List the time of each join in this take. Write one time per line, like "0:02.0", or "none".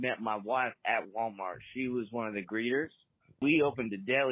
0:03.4